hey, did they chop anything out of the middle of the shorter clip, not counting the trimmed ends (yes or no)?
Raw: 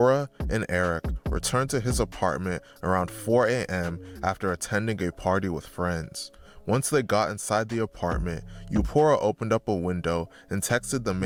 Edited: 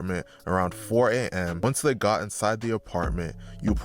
yes